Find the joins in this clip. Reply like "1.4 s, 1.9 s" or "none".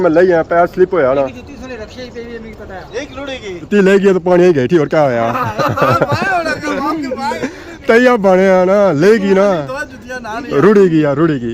3.6 s